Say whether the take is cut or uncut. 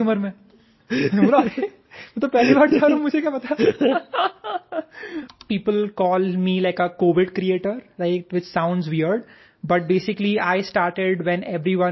cut